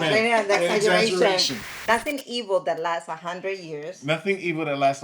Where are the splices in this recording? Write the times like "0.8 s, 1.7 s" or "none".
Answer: 1.7 s